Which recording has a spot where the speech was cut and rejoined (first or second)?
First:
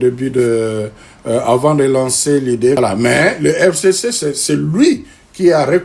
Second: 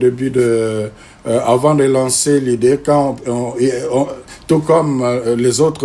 first